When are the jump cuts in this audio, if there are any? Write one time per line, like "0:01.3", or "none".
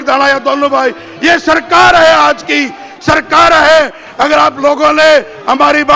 none